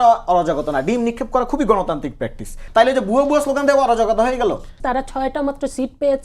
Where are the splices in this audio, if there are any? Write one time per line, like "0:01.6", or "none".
0:02.6
0:04.8